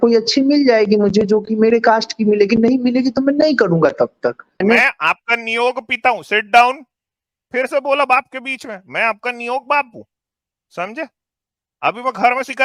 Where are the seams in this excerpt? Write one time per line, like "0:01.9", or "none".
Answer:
0:04.6